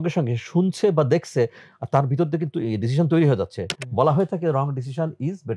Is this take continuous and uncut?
yes; 0 cuts

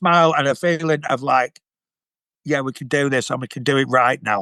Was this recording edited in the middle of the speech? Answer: no; 0 cuts

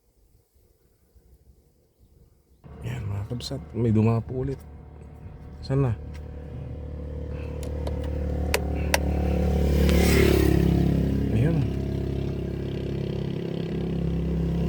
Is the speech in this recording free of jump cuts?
no; 1 cut; at 2.6 s

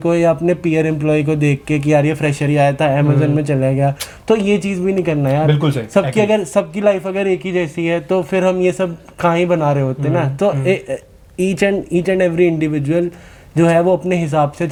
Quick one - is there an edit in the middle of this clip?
no; 0 cuts

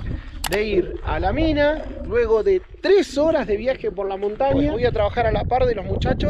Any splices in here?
yes; 1 cut; at 4.7 s

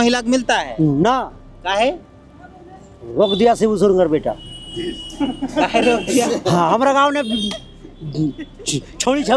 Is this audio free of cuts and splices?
yes; 0 cuts

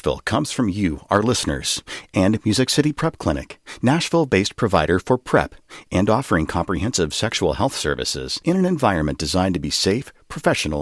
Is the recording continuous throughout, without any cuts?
yes; 0 cuts

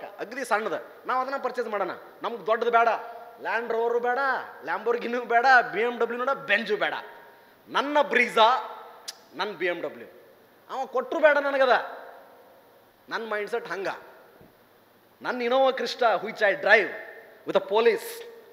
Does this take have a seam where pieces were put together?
no; 0 cuts

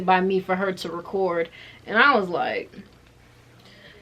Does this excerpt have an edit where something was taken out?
yes; 1 cut; at 1.6 s

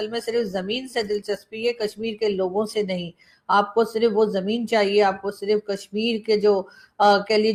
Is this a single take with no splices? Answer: yes; 0 cuts

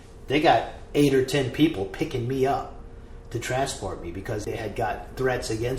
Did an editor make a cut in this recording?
yes; 1 cut; at 4.5 s

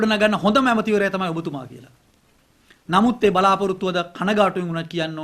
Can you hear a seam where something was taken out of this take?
no; 0 cuts

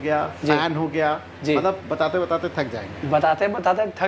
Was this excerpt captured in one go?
yes; 0 cuts

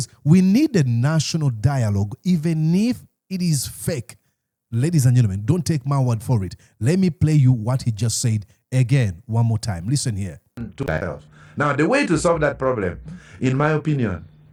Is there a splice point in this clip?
no; 0 cuts

